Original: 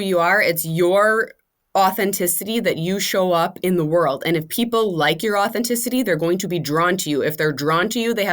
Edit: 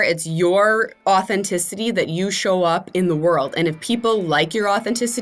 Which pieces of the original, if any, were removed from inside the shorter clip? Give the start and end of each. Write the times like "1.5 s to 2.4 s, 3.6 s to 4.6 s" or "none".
1.3 s to 1.6 s